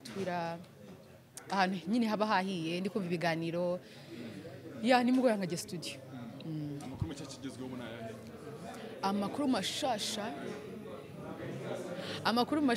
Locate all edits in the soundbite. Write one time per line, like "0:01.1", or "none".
none